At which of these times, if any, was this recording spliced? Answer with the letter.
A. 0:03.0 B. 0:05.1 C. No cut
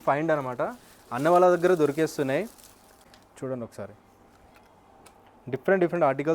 A